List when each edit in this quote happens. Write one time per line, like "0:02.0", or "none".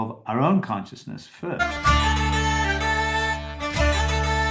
0:01.6